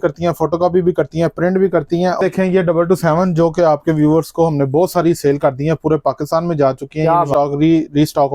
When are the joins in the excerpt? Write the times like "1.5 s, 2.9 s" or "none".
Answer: 2.2 s, 7.3 s